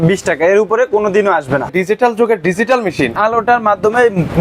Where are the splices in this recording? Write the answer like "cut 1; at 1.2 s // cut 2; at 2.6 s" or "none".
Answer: cut 1; at 1.7 s // cut 2; at 3.2 s